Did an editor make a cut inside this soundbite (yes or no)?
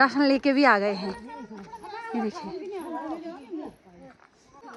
no